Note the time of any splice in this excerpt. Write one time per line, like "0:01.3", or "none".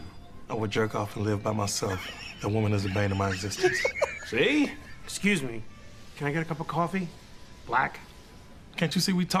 none

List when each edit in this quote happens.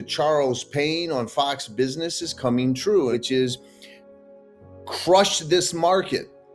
0:03.1

